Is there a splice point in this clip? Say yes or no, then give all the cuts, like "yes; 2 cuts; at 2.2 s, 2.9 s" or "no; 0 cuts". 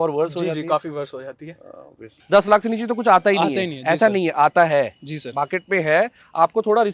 yes; 1 cut; at 2.1 s